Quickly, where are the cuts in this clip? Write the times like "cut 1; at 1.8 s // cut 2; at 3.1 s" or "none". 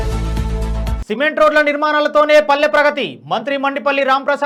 none